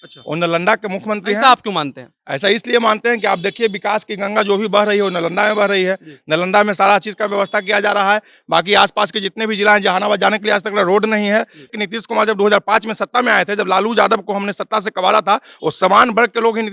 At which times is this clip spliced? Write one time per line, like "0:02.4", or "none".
0:11.8